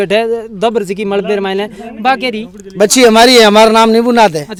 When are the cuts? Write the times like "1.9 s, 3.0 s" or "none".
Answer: none